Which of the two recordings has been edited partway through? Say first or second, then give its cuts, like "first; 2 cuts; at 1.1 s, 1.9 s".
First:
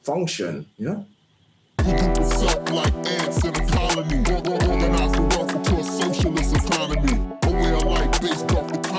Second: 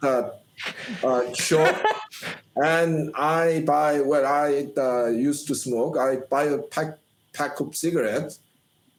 first; 1 cut; at 1.8 s